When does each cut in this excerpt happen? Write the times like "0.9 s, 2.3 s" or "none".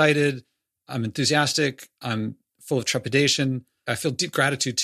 2.5 s, 3.9 s

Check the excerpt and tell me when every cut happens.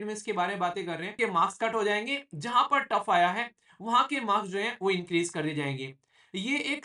1.2 s

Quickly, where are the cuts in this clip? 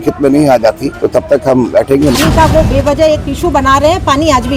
0.9 s, 2.2 s

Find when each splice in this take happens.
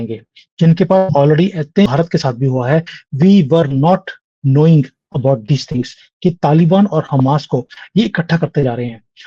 1.9 s

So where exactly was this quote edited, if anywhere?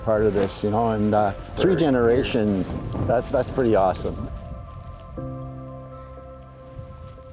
none

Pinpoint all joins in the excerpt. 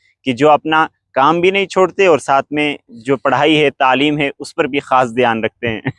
none

